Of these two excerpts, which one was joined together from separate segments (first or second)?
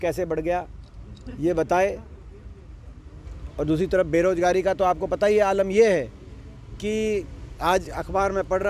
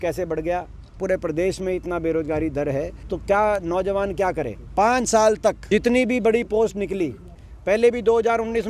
second